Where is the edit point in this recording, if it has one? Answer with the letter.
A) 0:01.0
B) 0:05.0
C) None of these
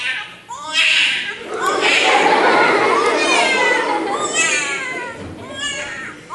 A